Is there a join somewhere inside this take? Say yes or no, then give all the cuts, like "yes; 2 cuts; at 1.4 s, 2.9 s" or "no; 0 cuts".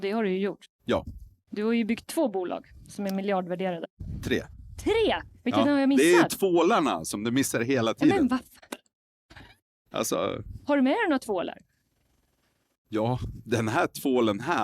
no; 0 cuts